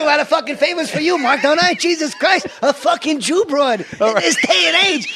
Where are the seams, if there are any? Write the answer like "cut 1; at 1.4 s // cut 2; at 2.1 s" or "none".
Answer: cut 1; at 1.0 s

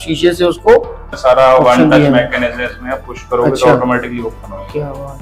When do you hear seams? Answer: cut 1; at 1.0 s

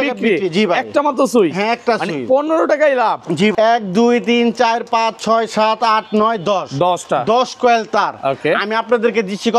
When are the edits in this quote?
cut 1; at 3.5 s

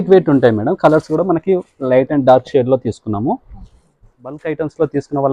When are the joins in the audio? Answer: cut 1; at 4.4 s

